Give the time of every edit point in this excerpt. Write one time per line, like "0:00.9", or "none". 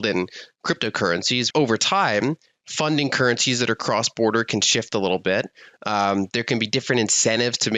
0:01.5